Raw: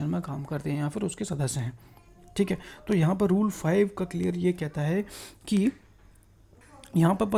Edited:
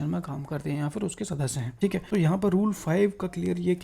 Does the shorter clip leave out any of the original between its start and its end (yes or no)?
yes